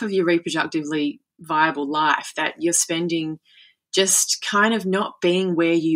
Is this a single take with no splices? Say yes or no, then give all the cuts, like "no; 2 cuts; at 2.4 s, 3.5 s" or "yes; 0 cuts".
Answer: yes; 0 cuts